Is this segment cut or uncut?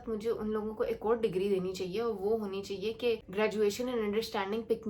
uncut